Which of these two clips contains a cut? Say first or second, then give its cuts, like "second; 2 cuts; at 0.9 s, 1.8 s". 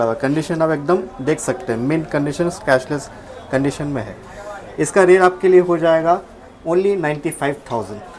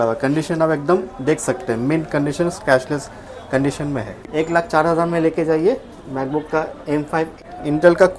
second; 2 cuts; at 4.2 s, 7.4 s